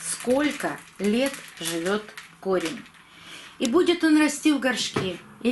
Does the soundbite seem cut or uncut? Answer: uncut